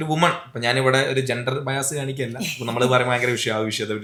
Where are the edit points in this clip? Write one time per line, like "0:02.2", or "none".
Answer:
none